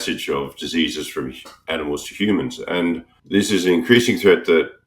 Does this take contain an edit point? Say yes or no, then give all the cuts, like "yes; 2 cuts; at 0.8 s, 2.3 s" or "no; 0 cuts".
yes; 1 cut; at 3.1 s